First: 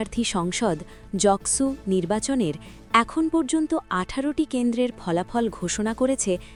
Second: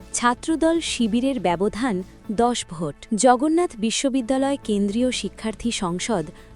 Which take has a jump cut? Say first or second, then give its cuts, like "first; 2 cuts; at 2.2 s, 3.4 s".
second; 1 cut; at 3.0 s